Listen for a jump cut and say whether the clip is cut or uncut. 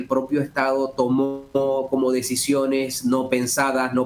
uncut